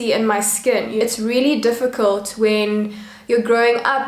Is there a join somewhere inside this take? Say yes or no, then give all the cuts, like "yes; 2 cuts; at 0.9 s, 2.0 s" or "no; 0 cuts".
yes; 1 cut; at 1.0 s